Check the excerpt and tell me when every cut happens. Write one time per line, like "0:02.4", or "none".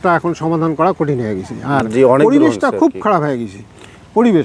none